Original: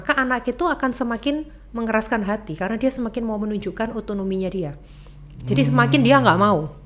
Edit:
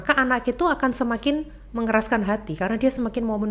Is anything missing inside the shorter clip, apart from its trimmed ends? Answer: no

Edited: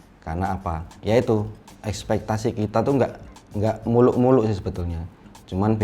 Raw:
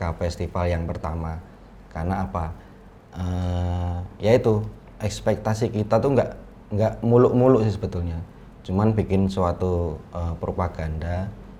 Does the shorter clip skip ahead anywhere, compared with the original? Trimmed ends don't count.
yes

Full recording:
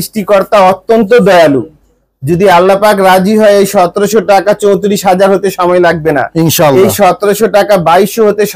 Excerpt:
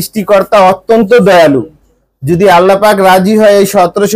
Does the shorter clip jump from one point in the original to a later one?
no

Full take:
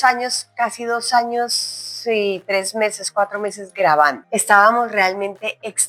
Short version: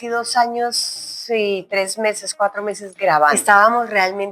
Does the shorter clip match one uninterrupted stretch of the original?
no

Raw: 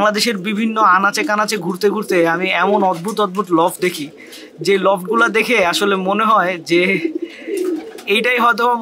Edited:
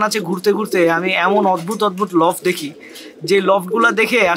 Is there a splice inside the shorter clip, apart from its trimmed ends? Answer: no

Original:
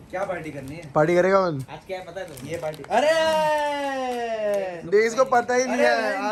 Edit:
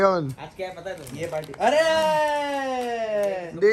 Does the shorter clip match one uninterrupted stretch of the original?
yes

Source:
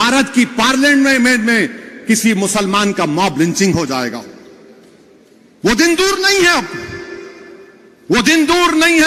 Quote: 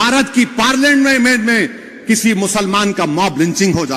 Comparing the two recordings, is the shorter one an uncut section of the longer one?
yes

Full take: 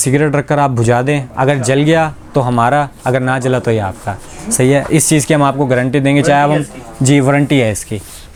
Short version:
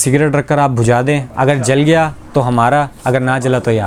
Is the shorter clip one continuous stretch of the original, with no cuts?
yes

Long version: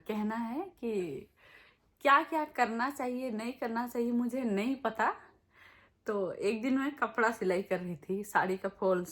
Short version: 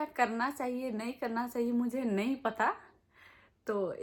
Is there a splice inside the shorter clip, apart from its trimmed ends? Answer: no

